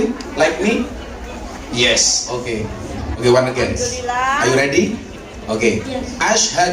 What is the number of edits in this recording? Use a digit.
1